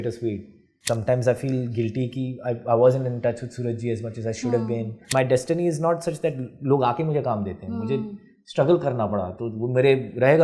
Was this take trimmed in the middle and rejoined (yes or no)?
yes